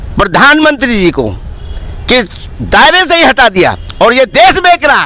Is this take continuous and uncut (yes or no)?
yes